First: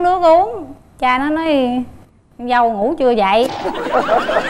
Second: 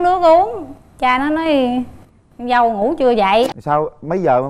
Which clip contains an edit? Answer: second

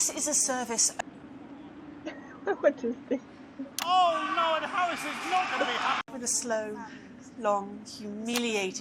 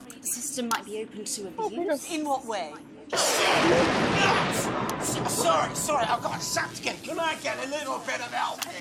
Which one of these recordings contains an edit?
first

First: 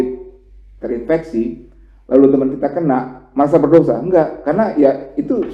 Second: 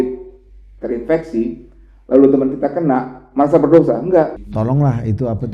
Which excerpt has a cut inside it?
second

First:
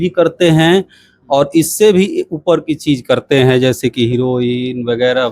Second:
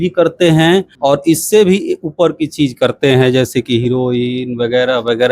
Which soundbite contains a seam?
second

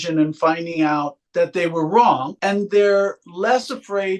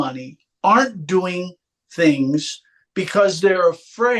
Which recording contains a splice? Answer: first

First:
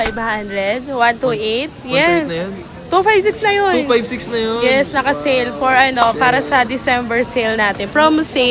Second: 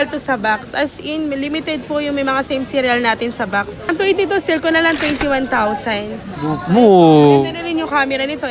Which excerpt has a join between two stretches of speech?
second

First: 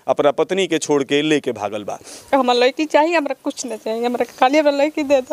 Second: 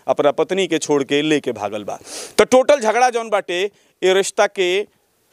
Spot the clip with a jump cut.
first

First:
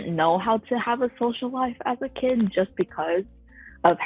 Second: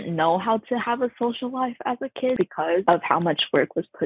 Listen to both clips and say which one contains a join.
second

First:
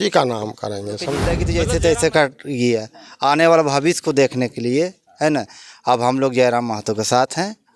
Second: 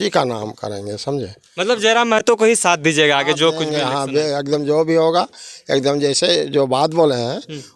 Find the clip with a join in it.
first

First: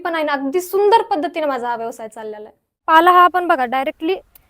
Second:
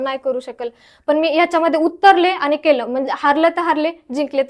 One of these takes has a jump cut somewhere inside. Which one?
first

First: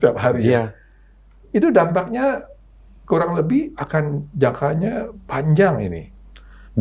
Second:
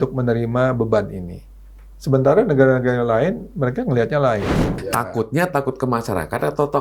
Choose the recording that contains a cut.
second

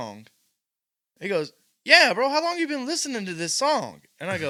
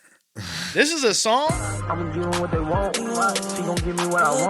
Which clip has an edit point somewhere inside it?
second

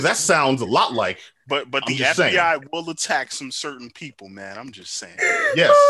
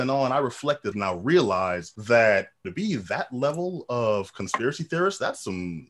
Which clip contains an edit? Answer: second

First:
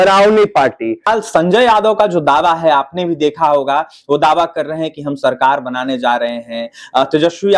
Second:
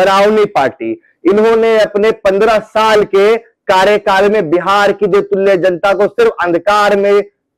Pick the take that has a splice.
first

